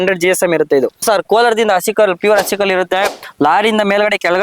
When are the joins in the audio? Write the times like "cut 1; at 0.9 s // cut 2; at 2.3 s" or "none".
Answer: cut 1; at 1.0 s